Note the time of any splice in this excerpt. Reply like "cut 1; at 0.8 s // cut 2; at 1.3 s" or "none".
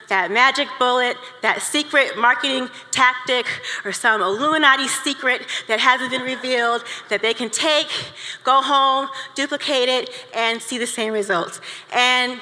none